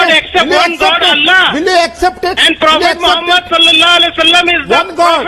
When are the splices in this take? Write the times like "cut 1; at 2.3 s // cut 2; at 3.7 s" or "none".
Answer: none